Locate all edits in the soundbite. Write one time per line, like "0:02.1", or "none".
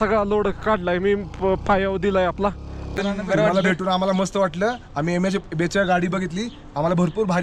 0:02.9